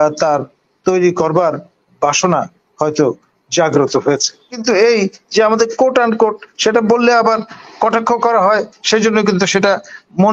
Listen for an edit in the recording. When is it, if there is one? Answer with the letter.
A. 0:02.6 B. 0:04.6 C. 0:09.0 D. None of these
B